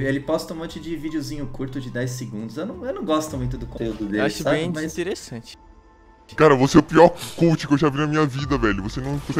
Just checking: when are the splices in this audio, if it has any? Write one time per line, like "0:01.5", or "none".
0:06.0